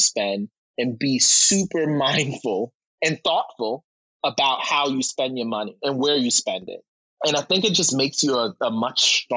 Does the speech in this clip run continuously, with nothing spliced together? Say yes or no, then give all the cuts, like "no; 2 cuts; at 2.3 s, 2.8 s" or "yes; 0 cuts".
yes; 0 cuts